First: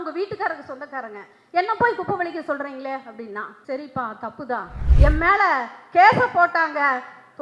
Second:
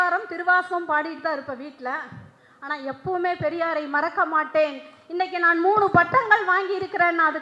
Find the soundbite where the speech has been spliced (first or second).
first